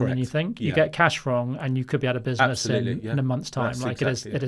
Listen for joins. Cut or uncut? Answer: uncut